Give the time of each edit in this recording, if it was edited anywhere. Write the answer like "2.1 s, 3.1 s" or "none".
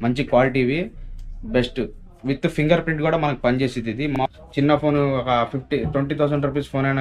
4.1 s

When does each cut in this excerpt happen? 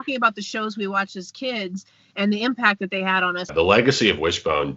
3.5 s

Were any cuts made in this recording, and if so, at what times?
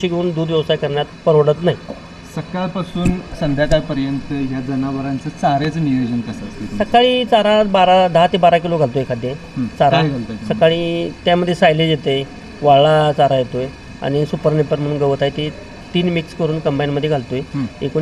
none

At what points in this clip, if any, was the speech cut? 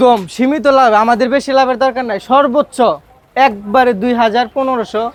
none

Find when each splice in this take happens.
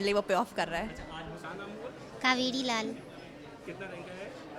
1.4 s

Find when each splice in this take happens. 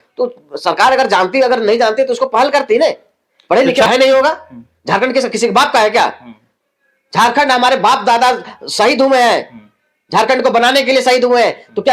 3.9 s

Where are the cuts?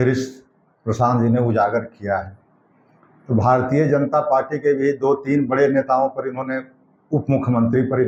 none

